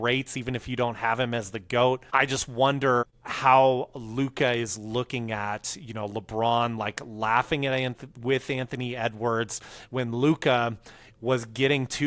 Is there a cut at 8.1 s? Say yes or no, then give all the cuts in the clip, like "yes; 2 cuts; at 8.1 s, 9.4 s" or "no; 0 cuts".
no; 2 cuts; at 2.1 s, 3.0 s